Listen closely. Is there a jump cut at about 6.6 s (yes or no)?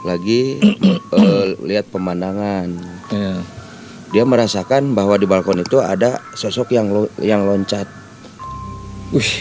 no